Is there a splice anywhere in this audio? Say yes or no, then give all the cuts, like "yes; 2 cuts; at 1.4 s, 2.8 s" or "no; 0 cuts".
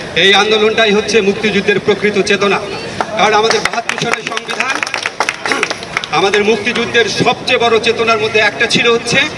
no; 0 cuts